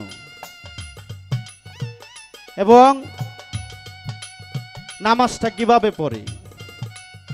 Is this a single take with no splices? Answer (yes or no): yes